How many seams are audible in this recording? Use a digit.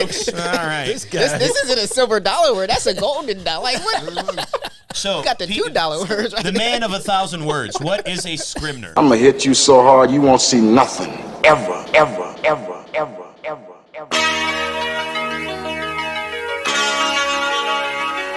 1